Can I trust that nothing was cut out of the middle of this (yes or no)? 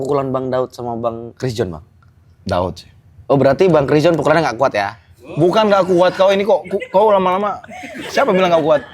no